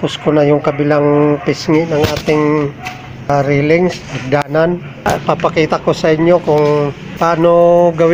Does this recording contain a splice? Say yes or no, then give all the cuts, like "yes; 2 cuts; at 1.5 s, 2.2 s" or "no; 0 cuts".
yes; 3 cuts; at 3.3 s, 5.1 s, 7.0 s